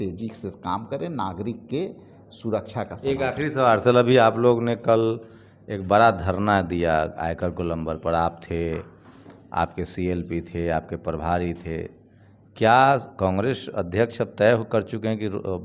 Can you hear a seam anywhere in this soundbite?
no; 0 cuts

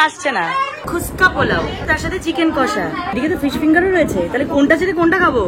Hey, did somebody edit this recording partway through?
yes; 3 cuts; at 0.9 s, 1.8 s, 3.1 s

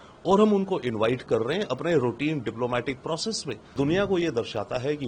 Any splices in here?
yes; 1 cut; at 3.7 s

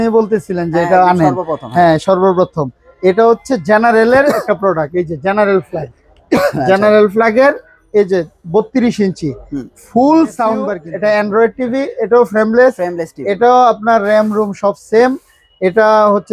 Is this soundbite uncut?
no; 1 cut; at 10.8 s

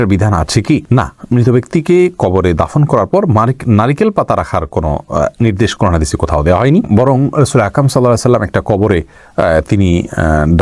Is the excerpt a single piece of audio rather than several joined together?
yes; 0 cuts

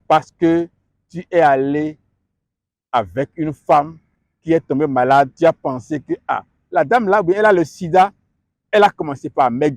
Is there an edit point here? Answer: no; 0 cuts

